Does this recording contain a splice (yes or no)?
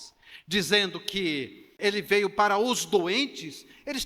yes